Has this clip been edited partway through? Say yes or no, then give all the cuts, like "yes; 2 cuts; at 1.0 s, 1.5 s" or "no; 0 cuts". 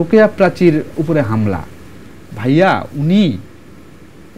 no; 0 cuts